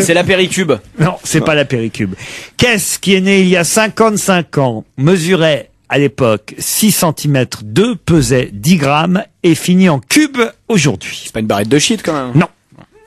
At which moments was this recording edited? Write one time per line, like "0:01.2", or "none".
none